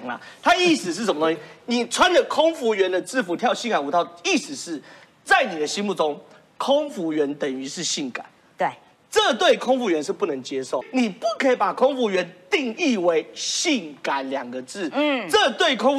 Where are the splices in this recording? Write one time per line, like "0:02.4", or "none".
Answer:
0:10.8